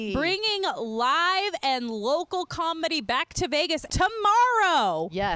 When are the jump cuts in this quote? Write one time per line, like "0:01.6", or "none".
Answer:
0:03.9